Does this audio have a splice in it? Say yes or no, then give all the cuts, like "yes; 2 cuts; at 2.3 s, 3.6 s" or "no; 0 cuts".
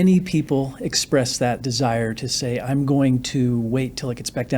yes; 1 cut; at 1.7 s